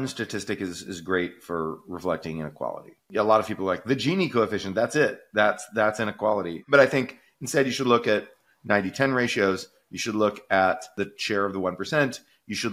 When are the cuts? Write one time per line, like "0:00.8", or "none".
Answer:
0:03.1
0:11.1